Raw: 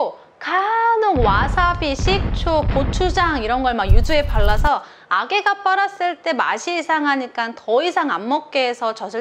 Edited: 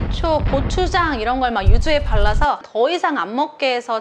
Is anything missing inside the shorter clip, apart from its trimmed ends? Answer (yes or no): yes